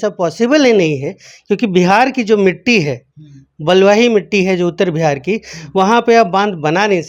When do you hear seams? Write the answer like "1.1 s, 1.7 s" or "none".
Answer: none